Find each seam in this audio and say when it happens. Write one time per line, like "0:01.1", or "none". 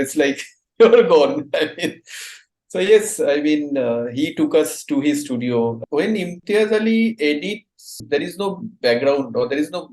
0:05.8
0:08.0